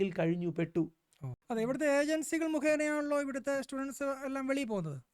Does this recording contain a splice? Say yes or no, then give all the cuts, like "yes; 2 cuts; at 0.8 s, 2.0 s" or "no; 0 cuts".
yes; 1 cut; at 1.1 s